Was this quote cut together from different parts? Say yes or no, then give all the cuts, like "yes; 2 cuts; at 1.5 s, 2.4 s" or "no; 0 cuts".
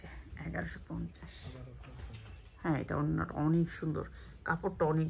no; 0 cuts